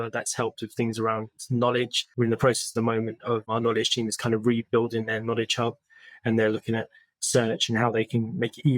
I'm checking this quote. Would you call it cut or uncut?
cut